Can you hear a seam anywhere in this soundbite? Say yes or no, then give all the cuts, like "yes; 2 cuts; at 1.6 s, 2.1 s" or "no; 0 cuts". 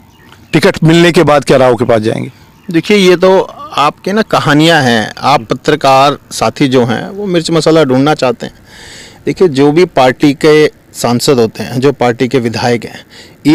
no; 0 cuts